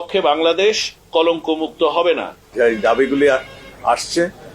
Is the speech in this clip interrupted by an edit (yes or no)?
yes